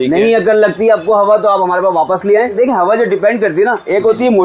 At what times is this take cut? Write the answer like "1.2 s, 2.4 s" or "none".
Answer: 2.5 s